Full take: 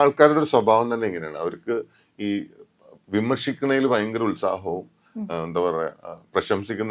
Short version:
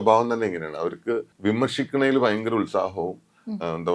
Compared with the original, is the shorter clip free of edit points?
no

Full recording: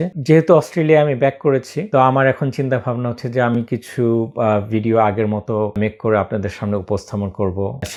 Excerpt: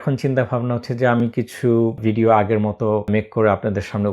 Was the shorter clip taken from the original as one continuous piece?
no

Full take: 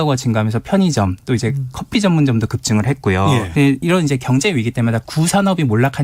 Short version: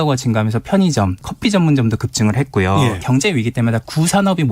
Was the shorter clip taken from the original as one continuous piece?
no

